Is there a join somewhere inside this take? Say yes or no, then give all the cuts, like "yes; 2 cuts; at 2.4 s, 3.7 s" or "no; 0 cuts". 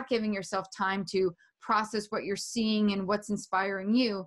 no; 0 cuts